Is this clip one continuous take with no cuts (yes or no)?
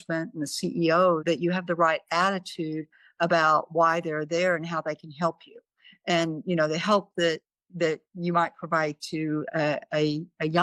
yes